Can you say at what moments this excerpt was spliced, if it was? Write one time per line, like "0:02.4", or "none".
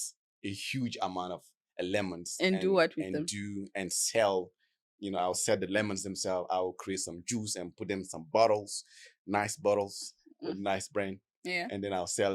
none